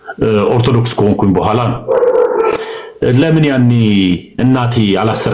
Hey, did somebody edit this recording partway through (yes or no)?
no